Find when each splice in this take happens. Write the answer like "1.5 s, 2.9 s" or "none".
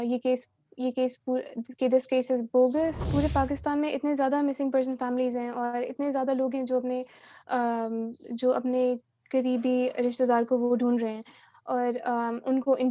3.0 s